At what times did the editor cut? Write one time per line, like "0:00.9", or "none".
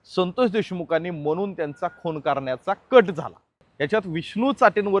0:03.7